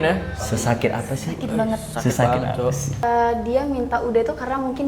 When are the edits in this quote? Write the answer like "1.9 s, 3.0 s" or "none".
3.0 s